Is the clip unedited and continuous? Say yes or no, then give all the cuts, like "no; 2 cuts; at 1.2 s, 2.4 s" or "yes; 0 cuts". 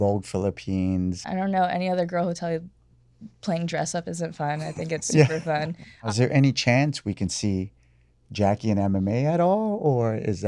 no; 2 cuts; at 1.2 s, 6.1 s